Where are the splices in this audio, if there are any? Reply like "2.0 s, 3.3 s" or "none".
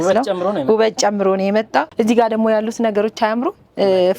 1.9 s